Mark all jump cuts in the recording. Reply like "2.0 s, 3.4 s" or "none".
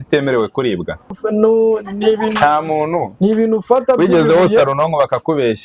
1.2 s